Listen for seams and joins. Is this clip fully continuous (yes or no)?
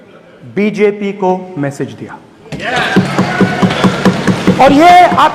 yes